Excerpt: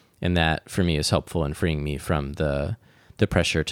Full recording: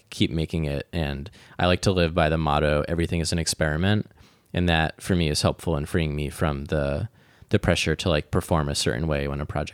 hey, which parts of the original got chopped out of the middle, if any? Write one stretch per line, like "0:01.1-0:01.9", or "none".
none